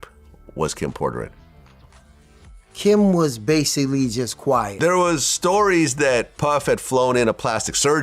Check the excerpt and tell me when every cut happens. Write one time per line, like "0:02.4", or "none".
0:04.7